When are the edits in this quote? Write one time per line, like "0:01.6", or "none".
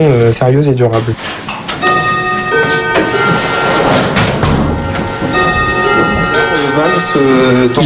none